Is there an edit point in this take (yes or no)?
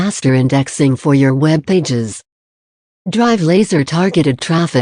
no